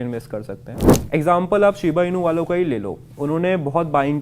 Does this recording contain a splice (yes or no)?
yes